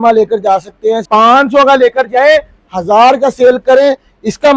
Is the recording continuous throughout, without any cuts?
no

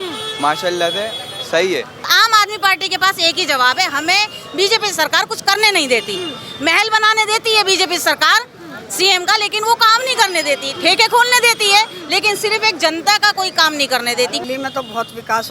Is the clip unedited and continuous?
no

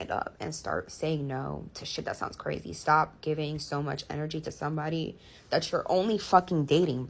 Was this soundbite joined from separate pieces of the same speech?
no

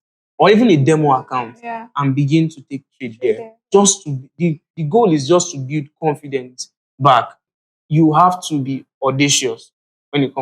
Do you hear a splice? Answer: yes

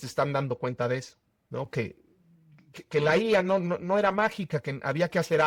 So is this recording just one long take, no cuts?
yes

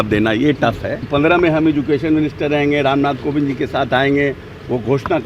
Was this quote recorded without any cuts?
no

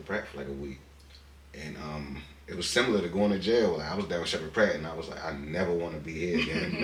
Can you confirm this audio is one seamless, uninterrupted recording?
yes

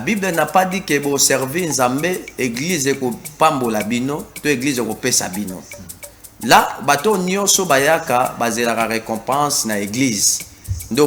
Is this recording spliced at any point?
no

